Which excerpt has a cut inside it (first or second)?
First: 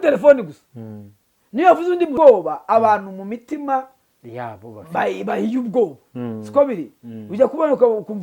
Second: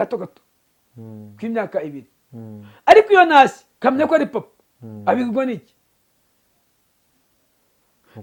first